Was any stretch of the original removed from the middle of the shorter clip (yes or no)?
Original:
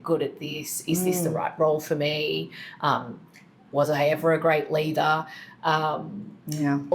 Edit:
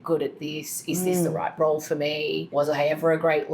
yes